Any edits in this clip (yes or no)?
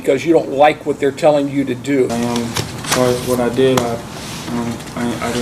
yes